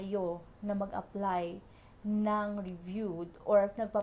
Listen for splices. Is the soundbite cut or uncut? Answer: uncut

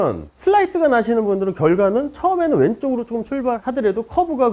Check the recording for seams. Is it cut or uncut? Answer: uncut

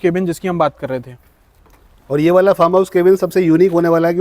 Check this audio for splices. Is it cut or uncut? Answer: uncut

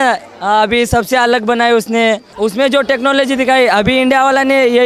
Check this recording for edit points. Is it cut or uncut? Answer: cut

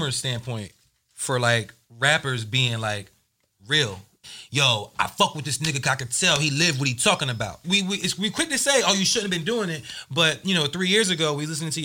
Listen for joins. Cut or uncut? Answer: cut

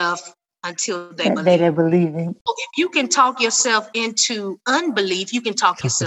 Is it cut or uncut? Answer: cut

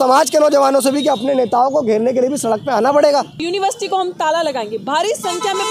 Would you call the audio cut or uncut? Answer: cut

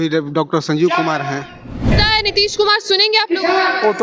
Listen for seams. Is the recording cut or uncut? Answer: cut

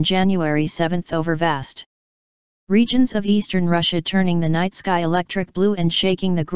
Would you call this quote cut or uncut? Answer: uncut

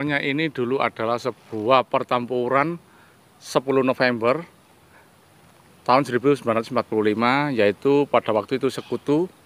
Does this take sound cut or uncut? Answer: uncut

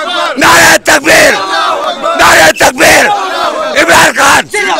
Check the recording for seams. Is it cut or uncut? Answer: uncut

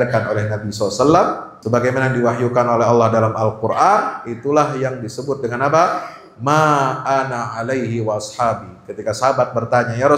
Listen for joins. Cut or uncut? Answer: cut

